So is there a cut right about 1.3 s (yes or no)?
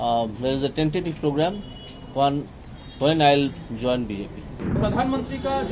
no